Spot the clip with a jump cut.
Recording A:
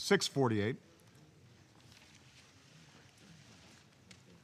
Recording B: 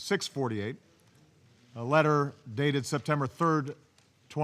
B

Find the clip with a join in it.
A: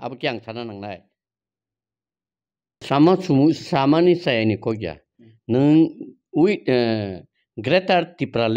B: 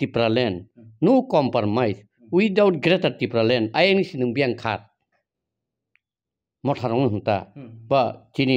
A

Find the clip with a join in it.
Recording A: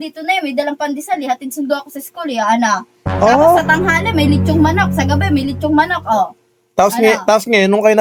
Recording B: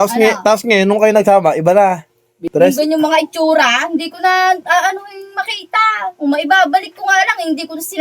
B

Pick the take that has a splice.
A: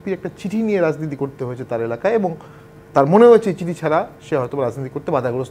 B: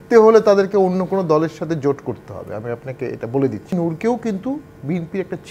B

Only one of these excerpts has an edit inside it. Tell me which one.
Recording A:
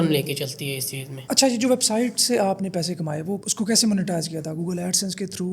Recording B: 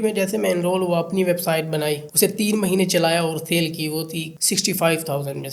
A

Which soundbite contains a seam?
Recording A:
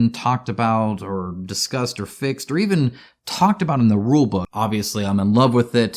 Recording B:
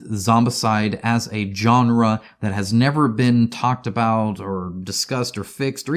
A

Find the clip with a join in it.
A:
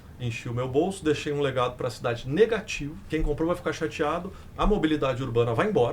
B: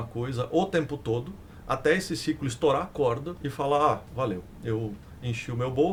A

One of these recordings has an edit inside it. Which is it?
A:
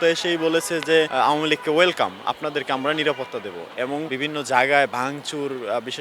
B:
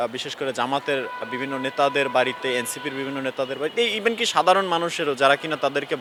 A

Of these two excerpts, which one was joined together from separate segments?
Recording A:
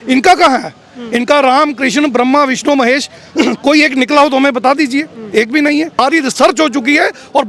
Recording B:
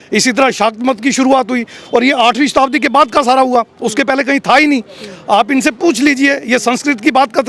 A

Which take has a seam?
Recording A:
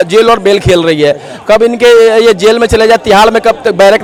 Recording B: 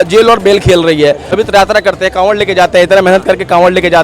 B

